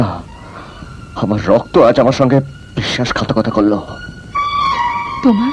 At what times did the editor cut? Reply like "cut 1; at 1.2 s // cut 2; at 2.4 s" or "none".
none